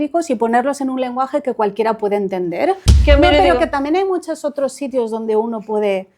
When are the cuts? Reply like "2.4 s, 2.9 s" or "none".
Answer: 2.9 s